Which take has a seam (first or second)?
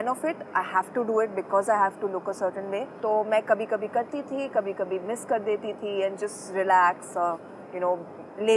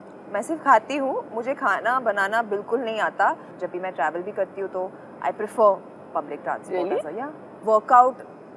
second